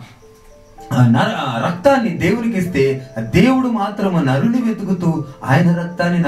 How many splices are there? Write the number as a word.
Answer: zero